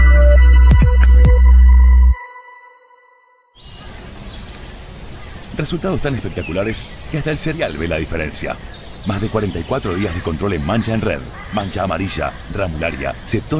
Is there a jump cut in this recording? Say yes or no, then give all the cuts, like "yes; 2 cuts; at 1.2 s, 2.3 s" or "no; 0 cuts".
yes; 1 cut; at 3.7 s